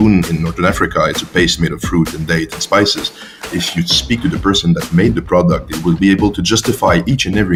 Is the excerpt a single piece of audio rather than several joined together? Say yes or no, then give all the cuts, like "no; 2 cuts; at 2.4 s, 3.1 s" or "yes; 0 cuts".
yes; 0 cuts